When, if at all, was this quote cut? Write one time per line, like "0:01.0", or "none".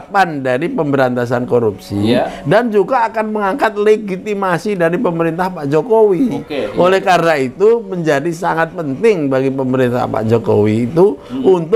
none